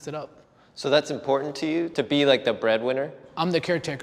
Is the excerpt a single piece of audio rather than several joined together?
no; 1 cut; at 1.9 s

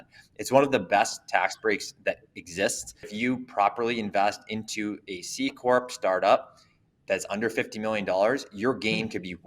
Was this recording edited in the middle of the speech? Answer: yes; 1 cut; at 3.1 s

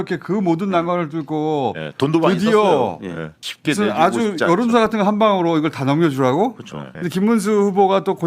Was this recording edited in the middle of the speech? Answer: yes; 2 cuts; at 3.4 s, 6.8 s

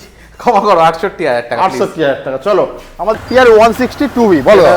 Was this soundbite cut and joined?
yes; 1 cut; at 3.2 s

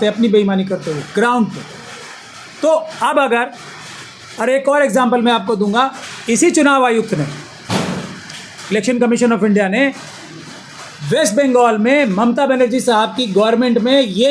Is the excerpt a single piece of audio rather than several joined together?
yes; 0 cuts

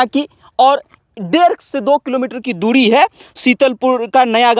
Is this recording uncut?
yes; 0 cuts

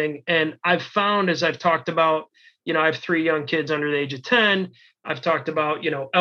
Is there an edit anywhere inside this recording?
no; 0 cuts

